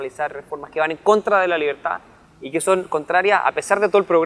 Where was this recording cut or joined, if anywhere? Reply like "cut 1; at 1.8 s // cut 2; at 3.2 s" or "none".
cut 1; at 2.7 s